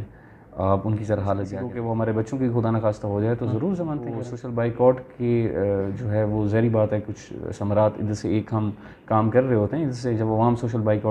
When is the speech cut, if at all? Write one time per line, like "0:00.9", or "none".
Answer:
0:01.6
0:04.4